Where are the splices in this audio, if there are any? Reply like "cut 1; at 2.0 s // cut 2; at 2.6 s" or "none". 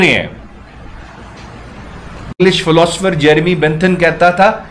cut 1; at 2.3 s